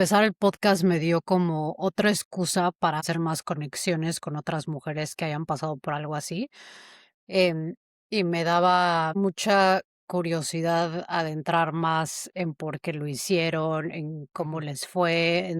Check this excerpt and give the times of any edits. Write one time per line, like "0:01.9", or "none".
0:03.0
0:09.1